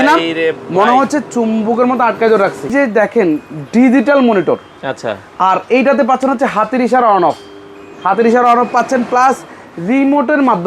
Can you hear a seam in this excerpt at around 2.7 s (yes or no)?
yes